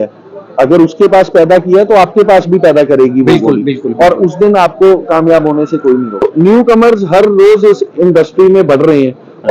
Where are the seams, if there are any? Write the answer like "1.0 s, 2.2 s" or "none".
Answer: 6.3 s